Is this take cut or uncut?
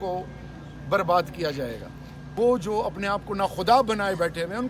cut